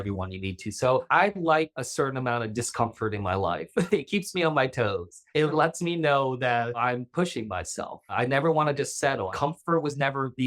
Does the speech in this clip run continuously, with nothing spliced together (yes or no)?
no